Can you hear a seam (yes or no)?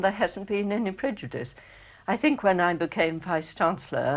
yes